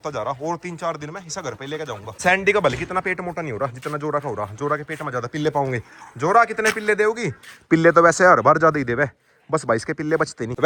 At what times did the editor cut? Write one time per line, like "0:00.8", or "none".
none